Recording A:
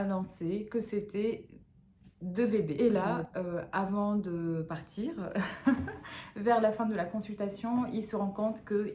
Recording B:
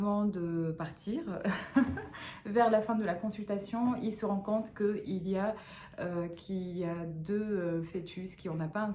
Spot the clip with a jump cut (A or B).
A